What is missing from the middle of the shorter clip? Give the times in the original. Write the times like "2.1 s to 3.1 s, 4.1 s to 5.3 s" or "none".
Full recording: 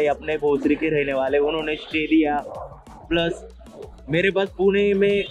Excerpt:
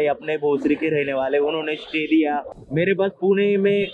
2.6 s to 3.9 s

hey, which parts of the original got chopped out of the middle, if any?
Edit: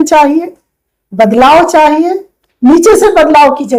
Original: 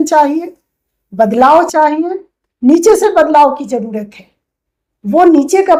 none

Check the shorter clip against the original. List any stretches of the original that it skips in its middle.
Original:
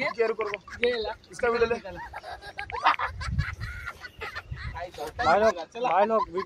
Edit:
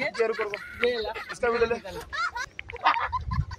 none

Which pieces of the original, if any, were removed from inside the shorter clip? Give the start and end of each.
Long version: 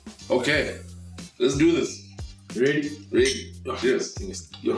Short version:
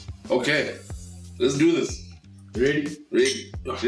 none

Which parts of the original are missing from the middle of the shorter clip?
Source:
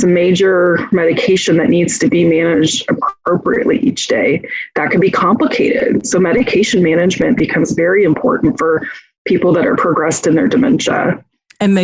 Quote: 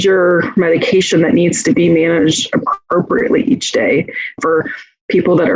4.7 s to 8.6 s

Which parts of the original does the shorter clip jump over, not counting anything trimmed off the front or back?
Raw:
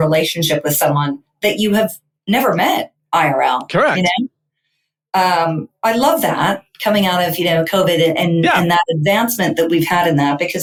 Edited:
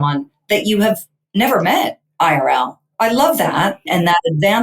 3.7 s to 5.6 s, 6.8 s to 8.6 s

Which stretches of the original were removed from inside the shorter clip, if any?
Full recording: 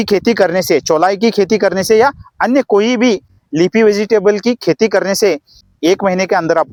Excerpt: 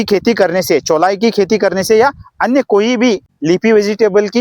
3.3 s to 3.4 s

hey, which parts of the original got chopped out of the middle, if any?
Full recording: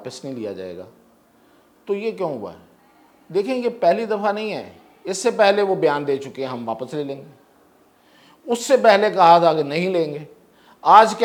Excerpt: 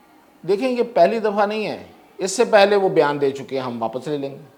none

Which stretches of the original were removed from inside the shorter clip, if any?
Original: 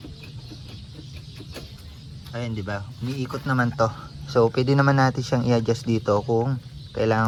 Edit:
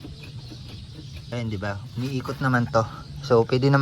1.3 s to 2.4 s

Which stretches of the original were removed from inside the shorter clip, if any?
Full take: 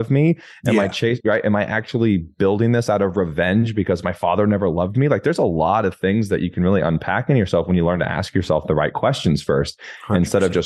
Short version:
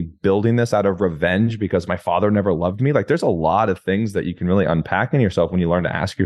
none

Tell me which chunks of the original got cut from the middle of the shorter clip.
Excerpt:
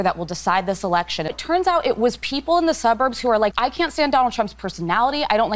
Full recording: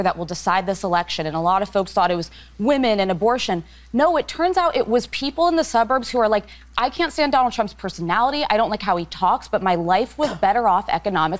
1.4 s to 4.2 s, 6.4 s to 6.7 s

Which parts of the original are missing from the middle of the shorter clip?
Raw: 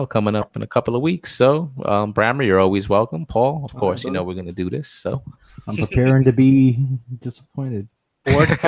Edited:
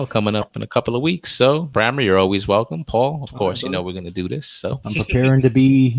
1.7 s to 2.1 s, 5.2 s to 5.6 s

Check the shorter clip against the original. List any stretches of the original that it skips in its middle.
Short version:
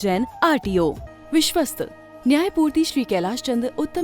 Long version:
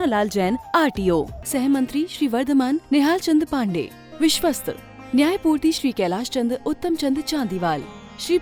1.4 s to 4.0 s

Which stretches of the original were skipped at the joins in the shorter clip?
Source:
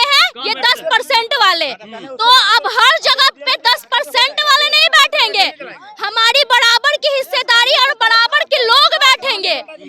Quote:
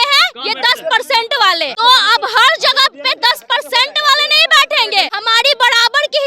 1.7 s to 2.1 s, 5.6 s to 6.1 s

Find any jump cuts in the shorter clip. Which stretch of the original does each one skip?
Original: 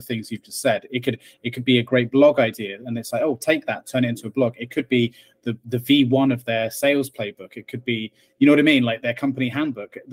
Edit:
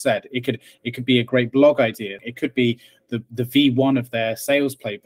2.8 s to 4.6 s

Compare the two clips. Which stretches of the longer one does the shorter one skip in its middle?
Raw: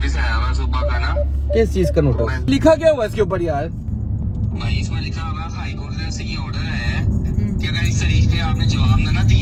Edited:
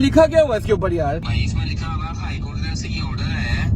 3.7 s to 4.6 s

